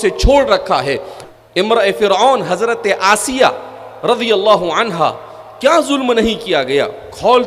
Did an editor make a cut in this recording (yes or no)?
yes